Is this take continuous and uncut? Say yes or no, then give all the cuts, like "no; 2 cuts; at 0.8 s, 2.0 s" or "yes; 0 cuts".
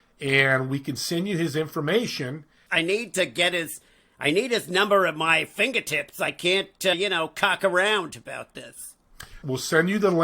no; 3 cuts; at 2.6 s, 6.9 s, 9.3 s